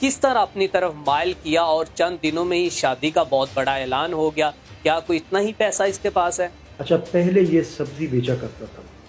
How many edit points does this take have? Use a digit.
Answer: 1